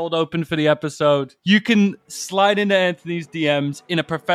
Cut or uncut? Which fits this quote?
cut